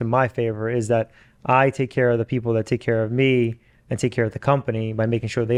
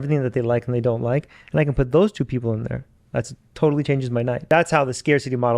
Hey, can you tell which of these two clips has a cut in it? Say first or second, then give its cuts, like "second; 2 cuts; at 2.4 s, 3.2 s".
second; 1 cut; at 4.4 s